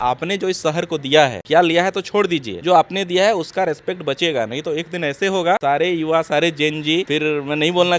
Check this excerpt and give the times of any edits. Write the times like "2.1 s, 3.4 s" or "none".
1.4 s, 2.5 s, 5.6 s, 7.1 s